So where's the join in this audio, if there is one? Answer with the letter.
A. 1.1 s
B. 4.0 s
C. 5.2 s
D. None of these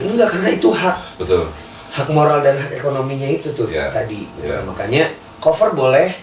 C